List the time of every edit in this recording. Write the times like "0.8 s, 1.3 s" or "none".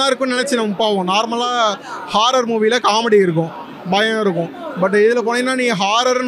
none